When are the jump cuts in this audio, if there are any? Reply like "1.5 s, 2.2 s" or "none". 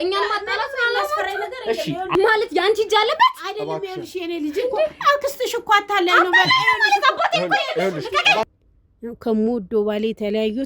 2.1 s, 8.6 s